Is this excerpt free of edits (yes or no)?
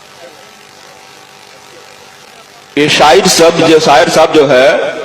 no